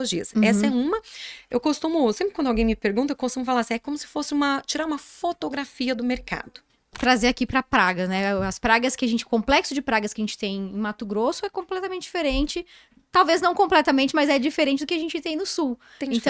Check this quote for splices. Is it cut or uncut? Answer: cut